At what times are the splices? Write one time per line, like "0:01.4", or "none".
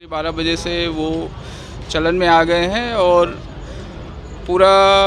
none

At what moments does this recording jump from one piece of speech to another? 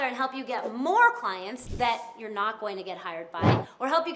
0:01.6

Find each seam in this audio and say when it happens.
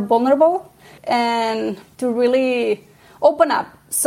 0:00.9
0:01.9

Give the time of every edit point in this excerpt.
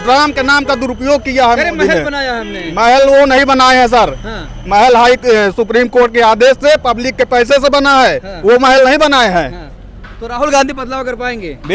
none

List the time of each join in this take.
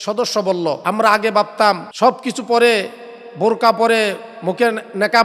0:00.8
0:01.9

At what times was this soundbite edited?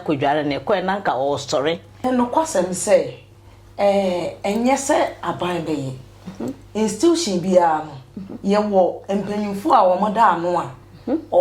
0:02.0

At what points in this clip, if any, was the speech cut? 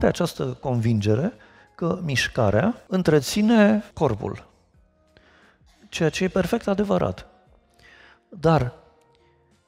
0:02.8
0:03.9

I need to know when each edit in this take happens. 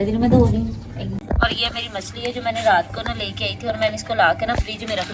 0:01.2

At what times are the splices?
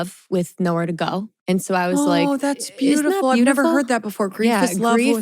0:01.3

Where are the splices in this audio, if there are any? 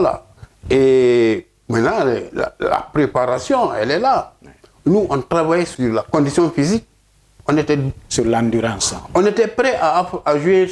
0:05.7

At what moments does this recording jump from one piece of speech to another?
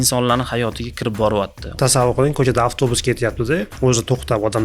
0:01.6
0:03.7

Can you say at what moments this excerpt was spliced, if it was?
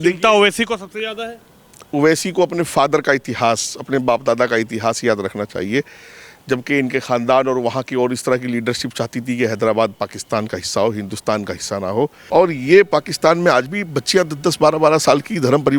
0:12.2

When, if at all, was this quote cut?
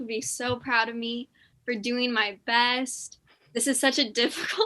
none

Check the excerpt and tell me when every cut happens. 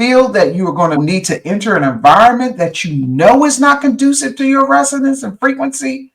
0:01.0

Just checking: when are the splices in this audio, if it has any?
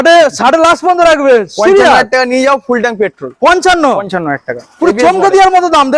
none

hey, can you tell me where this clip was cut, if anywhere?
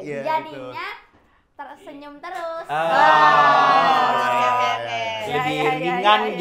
none

